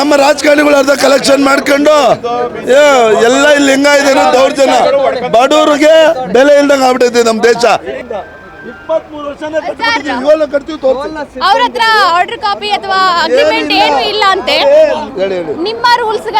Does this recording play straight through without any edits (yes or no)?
yes